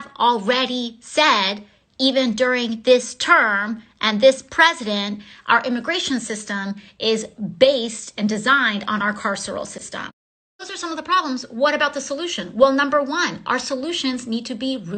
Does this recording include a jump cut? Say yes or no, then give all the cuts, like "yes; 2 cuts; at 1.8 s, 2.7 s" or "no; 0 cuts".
yes; 1 cut; at 5.7 s